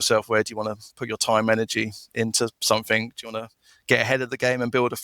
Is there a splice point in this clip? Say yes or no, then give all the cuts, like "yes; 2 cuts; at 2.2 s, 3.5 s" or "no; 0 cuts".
no; 0 cuts